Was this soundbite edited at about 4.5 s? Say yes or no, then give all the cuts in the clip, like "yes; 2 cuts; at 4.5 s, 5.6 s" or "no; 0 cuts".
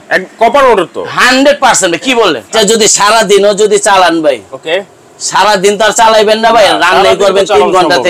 no; 1 cut; at 2.5 s